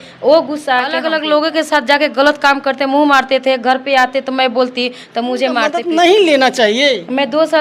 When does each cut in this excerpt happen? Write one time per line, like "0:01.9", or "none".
0:01.0
0:05.8